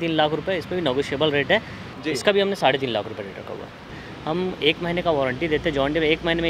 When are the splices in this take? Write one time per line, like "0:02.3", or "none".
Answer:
0:01.9
0:04.0